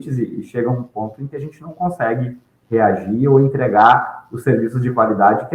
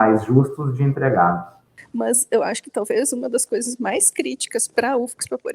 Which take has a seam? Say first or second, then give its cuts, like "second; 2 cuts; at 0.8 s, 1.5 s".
second; 1 cut; at 1.8 s